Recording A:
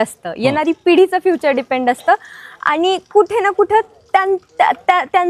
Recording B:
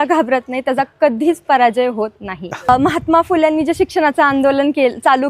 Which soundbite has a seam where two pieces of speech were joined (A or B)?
B